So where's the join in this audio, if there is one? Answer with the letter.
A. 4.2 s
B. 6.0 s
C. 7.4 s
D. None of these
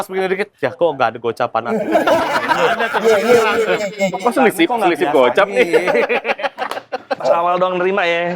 D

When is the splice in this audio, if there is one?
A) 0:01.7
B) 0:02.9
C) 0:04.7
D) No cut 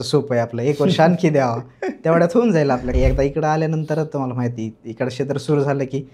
B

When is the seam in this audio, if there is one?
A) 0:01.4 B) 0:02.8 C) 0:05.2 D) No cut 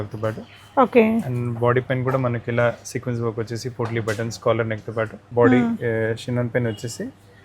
C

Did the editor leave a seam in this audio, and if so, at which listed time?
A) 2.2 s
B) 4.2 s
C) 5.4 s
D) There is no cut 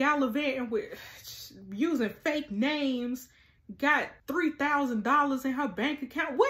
B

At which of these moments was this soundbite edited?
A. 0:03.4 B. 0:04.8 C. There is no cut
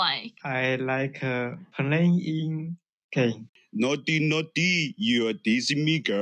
A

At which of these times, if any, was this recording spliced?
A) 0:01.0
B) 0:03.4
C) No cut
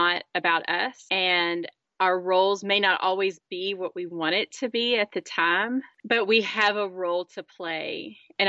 C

